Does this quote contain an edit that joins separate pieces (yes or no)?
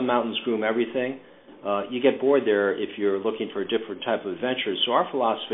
no